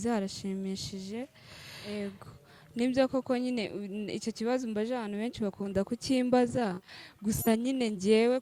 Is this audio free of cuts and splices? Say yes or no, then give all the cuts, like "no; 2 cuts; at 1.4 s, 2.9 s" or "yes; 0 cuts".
no; 1 cut; at 1.9 s